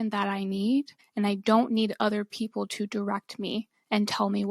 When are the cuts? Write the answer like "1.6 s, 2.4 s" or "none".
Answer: 1.0 s